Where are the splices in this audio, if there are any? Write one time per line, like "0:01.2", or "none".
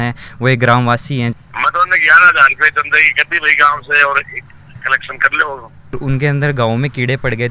0:01.3
0:05.9